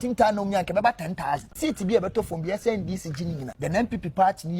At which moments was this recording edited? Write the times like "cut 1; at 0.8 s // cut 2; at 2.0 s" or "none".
cut 1; at 1.5 s